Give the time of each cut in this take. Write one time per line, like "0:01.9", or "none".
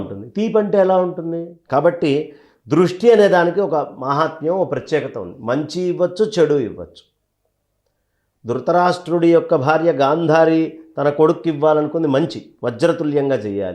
0:01.5